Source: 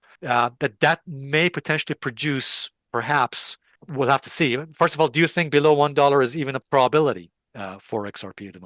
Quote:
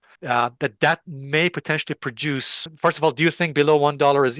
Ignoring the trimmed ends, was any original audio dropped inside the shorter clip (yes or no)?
yes